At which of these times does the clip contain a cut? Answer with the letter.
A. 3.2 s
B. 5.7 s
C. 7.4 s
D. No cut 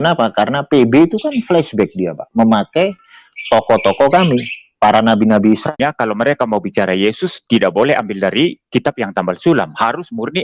B